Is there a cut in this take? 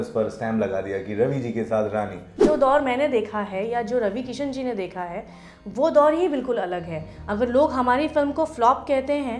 yes; 1 cut; at 2.4 s

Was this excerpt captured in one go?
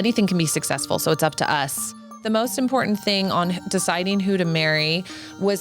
no; 1 cut; at 2.2 s

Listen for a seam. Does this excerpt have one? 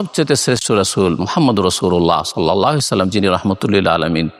no; 0 cuts

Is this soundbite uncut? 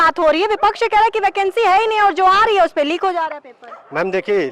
yes; 0 cuts

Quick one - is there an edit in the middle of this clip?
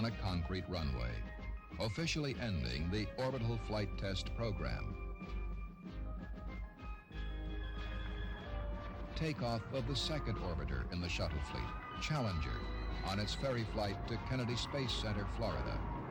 yes; 1 cut; at 6.1 s

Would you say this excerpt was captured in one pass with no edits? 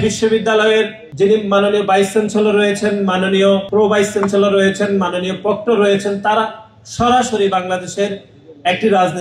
no; 2 cuts; at 1.0 s, 3.7 s

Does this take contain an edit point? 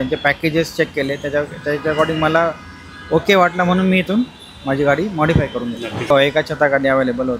yes; 1 cut; at 6.1 s

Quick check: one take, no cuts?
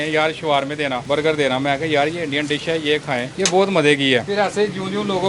no; 3 cuts; at 1.0 s, 3.3 s, 4.3 s

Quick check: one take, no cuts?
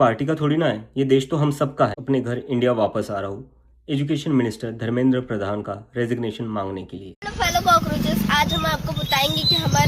no; 2 cuts; at 2.0 s, 7.2 s

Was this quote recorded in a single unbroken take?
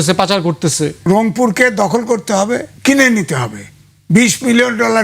no; 2 cuts; at 1.0 s, 2.7 s

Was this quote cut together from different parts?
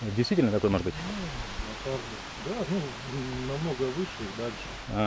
no; 0 cuts

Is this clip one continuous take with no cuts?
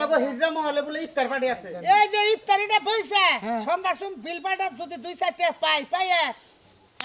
no; 1 cut; at 1.7 s

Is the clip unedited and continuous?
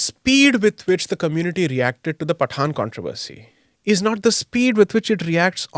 yes; 0 cuts

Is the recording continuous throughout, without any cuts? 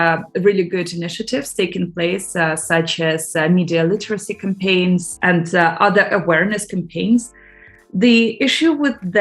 no; 2 cuts; at 5.1 s, 7.3 s

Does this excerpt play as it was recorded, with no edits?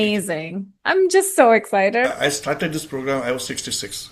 no; 1 cut; at 2.1 s

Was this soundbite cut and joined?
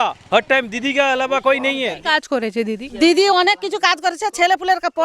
yes; 1 cut; at 2.0 s

